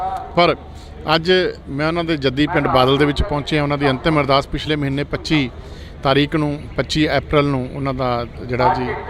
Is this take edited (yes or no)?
no